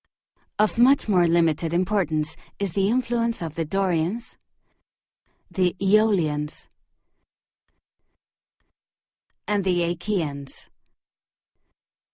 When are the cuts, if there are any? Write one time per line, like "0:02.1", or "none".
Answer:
0:03.9

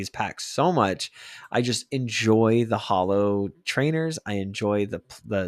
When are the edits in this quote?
none

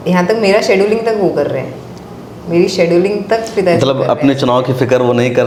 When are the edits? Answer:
none

